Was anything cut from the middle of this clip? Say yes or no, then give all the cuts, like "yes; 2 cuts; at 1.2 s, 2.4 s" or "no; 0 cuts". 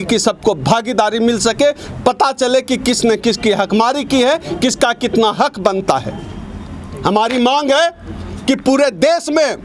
no; 0 cuts